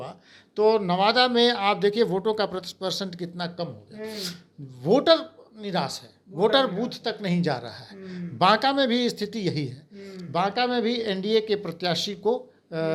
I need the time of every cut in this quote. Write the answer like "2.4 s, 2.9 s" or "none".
none